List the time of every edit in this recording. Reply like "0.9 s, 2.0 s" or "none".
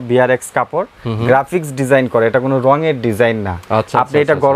none

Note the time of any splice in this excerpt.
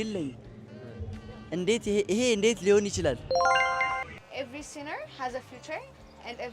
4.1 s

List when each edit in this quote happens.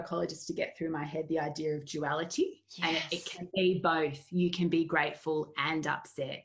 none

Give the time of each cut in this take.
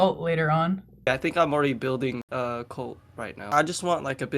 1.1 s, 3.5 s

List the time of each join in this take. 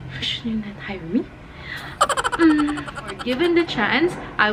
3.2 s

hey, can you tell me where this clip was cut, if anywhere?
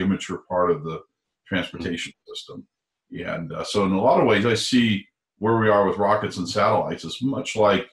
none

